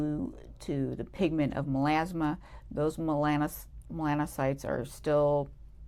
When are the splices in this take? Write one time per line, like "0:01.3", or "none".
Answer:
none